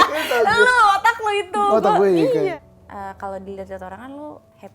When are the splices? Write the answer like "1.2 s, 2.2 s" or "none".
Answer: 2.5 s